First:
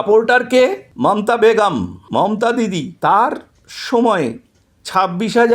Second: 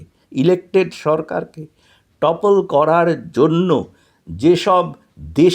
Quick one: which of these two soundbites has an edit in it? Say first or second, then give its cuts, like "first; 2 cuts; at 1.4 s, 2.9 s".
first; 3 cuts; at 0.9 s, 2.0 s, 2.9 s